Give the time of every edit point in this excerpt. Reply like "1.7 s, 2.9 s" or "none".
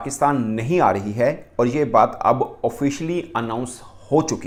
none